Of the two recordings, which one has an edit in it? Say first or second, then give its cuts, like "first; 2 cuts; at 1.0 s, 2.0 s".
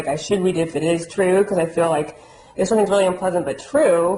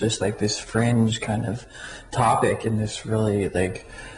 first; 1 cut; at 2.7 s